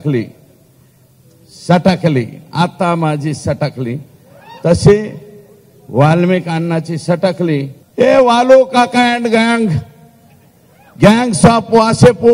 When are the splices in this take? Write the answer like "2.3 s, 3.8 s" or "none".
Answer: 7.8 s